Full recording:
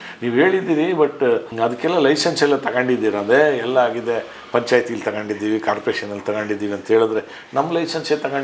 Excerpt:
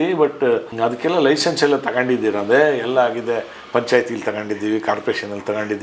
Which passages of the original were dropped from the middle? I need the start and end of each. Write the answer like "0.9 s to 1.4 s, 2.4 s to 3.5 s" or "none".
none